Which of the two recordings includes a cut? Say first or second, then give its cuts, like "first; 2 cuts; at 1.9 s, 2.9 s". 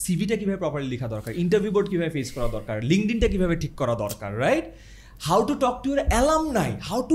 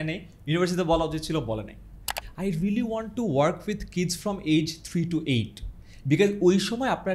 second; 1 cut; at 2.2 s